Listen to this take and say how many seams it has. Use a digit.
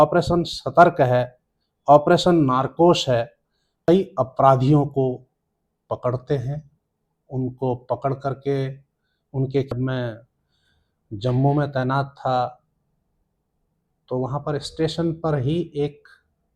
2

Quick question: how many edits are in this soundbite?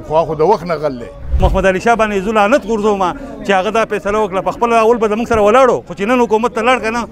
1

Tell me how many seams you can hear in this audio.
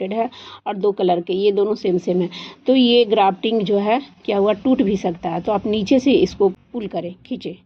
1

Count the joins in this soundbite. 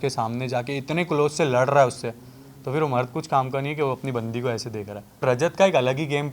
1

